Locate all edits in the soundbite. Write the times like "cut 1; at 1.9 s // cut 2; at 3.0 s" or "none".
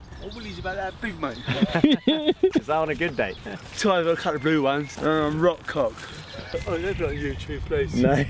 cut 1; at 3.5 s // cut 2; at 4.9 s // cut 3; at 6.5 s